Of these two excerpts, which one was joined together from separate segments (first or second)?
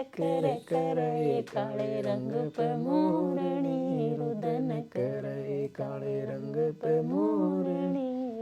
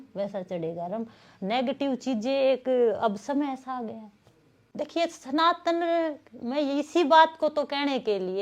second